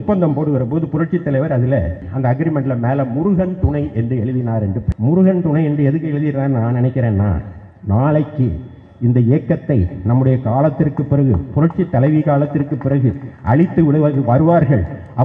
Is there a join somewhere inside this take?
yes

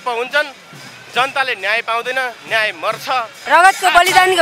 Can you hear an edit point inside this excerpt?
yes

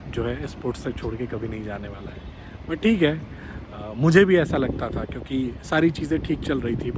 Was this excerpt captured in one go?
yes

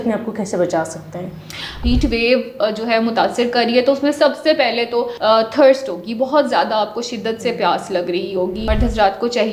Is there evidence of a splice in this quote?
yes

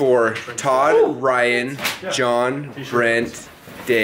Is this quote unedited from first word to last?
yes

